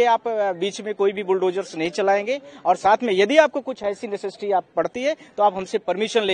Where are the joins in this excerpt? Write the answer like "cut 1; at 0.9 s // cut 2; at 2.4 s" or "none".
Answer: none